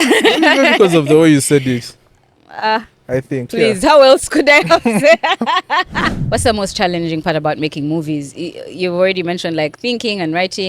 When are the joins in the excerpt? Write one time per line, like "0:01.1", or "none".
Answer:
0:06.1

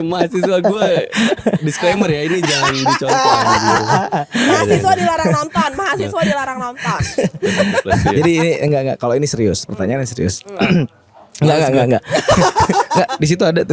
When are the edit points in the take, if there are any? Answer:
none

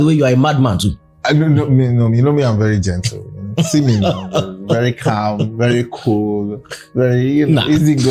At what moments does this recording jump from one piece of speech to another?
none

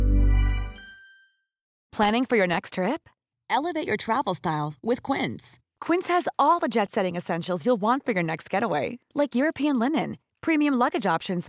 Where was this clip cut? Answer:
0:01.8

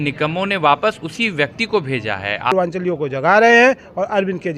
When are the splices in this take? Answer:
0:02.5

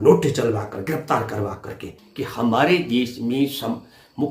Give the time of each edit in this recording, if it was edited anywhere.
0:02.0

